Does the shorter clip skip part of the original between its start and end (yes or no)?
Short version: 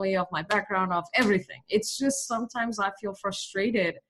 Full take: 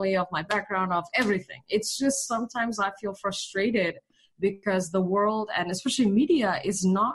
no